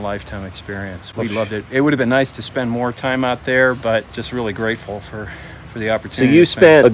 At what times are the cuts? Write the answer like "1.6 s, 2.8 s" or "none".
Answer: none